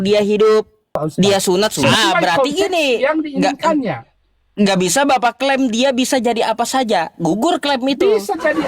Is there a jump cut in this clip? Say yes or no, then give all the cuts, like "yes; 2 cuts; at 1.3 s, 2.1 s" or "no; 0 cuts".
yes; 1 cut; at 1.9 s